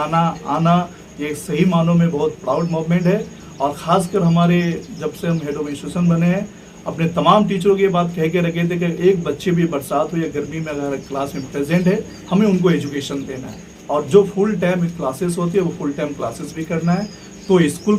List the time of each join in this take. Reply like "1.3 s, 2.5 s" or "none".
none